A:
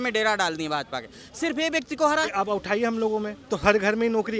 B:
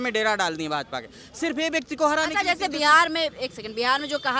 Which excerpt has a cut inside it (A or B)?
A